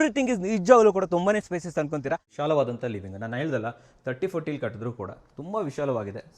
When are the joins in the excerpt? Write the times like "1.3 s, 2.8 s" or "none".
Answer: 2.3 s

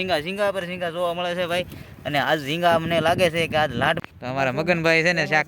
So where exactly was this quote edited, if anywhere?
4.0 s

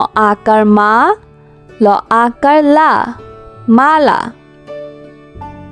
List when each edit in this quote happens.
4.6 s

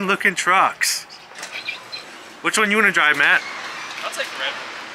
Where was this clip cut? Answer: 2.0 s

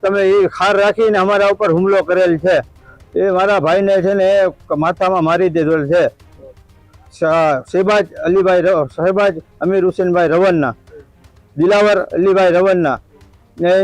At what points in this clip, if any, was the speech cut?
none

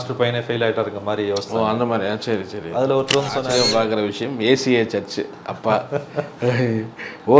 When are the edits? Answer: 3.5 s

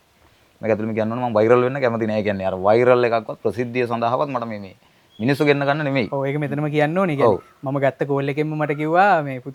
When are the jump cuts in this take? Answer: none

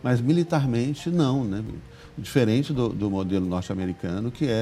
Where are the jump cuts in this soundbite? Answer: none

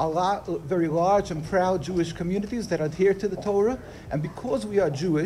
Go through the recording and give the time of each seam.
none

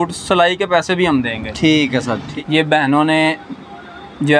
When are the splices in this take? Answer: 2.2 s

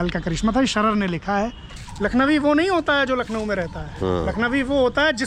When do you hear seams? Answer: 1.6 s

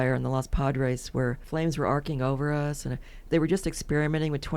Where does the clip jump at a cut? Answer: 1.4 s, 3.3 s

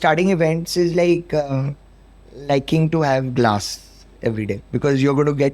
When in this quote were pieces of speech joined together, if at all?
4.6 s

